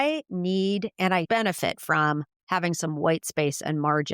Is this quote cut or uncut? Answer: cut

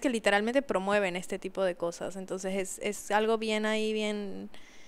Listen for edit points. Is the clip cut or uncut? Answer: uncut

